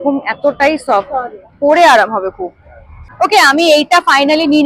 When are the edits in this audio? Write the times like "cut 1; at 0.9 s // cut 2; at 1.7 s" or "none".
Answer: cut 1; at 3.0 s

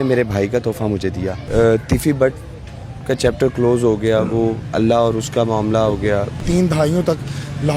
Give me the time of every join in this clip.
cut 1; at 1.4 s // cut 2; at 6.4 s

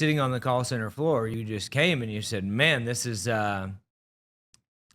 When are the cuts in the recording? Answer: cut 1; at 1.3 s

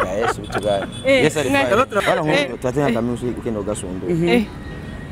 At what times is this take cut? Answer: cut 1; at 2.0 s

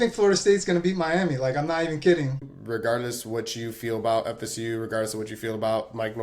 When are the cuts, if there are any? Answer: cut 1; at 2.5 s

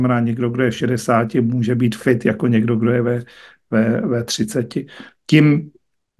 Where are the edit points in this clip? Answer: none

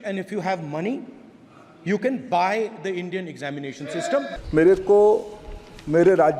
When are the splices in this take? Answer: cut 1; at 4.4 s

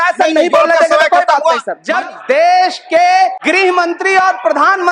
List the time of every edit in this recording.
cut 1; at 1.7 s // cut 2; at 3.4 s

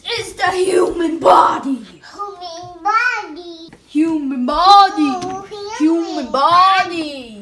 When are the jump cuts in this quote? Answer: cut 1; at 3.6 s

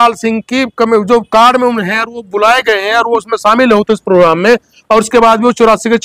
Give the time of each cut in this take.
none

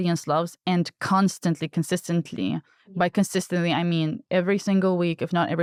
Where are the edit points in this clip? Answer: none

